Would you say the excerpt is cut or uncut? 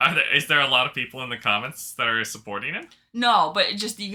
uncut